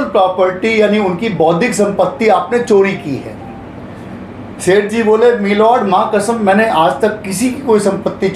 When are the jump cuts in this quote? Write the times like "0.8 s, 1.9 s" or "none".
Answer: none